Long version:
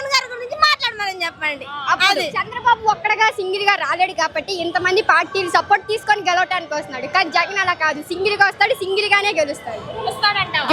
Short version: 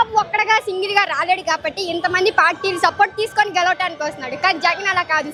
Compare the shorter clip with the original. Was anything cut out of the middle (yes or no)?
no